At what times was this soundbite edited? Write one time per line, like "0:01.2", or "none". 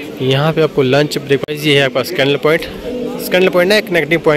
0:01.4